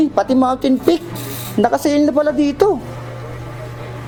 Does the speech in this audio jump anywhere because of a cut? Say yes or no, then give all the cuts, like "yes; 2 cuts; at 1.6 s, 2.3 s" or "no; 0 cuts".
no; 0 cuts